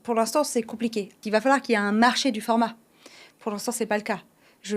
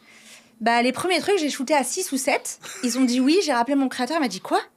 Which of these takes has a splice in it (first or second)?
first